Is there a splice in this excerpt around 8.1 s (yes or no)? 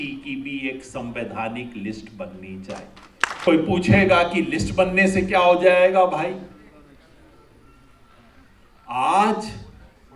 no